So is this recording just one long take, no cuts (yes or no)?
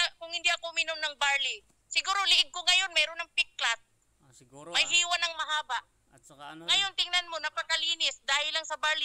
yes